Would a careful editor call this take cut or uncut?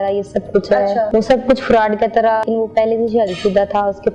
cut